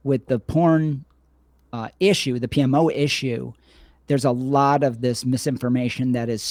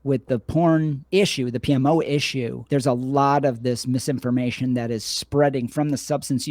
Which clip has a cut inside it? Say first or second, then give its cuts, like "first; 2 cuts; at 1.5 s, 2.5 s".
second; 2 cuts; at 1.0 s, 2.6 s